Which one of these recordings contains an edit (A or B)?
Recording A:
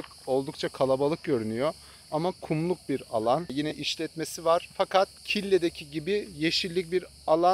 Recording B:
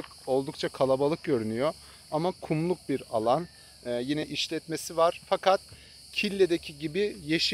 A